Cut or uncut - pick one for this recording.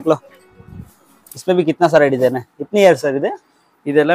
uncut